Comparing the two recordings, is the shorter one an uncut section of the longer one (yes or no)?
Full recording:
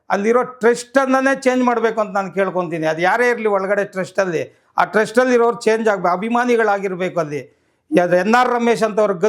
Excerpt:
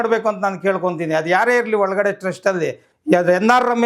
no